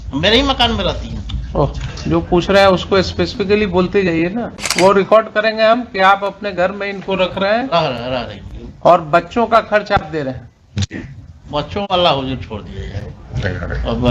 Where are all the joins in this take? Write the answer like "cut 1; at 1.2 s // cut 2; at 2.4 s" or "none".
cut 1; at 4.6 s